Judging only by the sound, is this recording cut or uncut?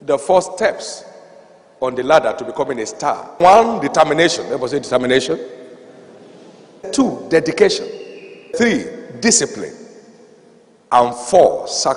cut